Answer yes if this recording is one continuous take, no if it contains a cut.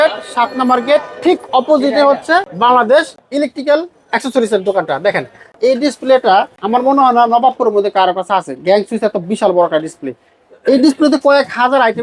no